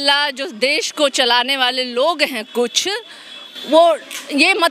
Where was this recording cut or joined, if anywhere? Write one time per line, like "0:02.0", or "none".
none